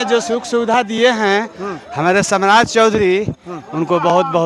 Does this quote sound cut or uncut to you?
uncut